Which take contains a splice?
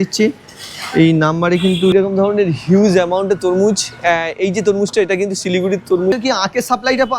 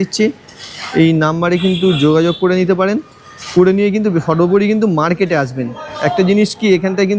first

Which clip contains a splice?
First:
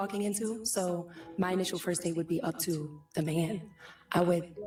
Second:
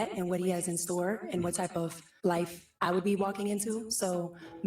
second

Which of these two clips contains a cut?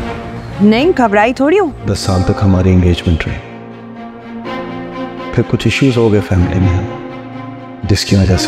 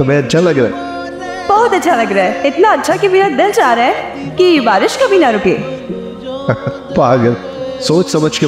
first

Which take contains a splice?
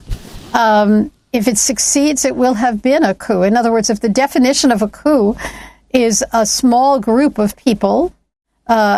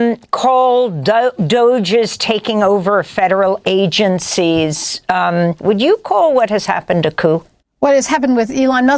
second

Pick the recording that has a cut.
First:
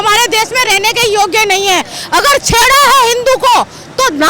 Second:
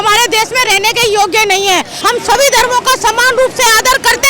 second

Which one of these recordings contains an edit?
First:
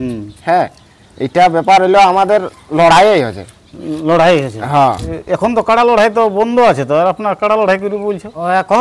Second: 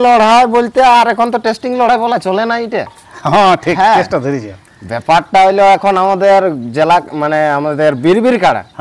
first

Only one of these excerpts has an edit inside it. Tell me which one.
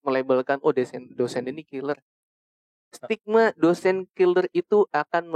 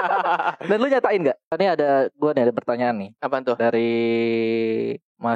second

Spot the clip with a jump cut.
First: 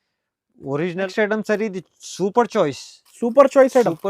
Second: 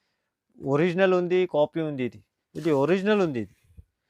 first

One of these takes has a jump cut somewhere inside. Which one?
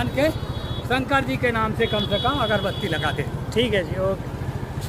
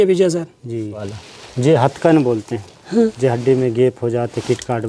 second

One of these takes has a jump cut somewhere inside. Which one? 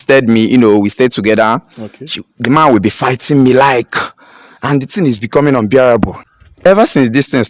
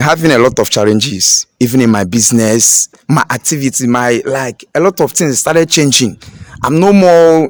first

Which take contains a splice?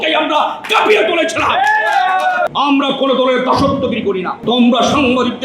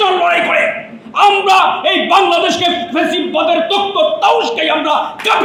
first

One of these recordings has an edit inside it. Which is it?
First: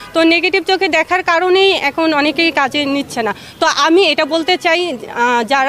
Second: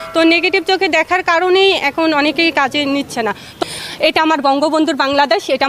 second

